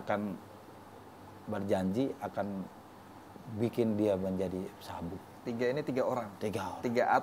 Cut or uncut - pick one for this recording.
uncut